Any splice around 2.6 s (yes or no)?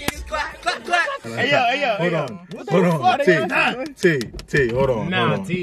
no